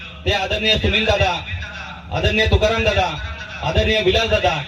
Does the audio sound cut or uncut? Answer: uncut